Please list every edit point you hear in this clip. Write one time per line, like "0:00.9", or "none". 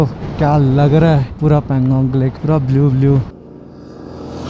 0:01.3
0:02.4
0:03.3